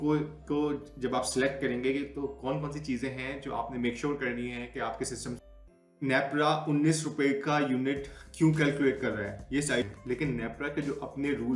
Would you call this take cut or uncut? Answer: cut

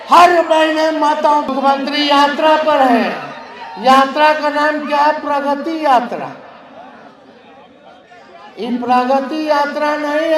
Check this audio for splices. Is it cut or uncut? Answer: cut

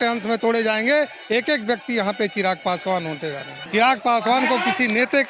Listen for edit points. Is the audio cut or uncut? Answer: cut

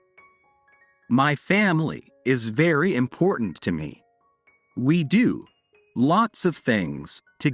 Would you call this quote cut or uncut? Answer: cut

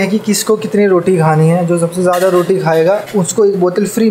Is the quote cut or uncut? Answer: uncut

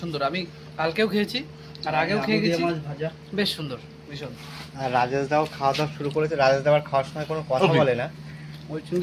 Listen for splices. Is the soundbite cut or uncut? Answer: uncut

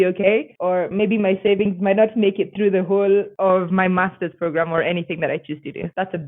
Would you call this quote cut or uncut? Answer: uncut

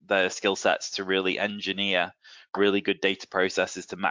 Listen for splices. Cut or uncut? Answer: uncut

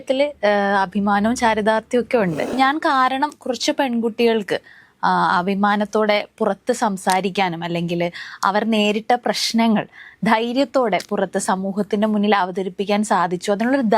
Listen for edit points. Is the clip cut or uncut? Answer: cut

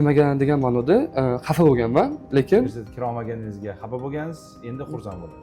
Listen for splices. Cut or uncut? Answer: cut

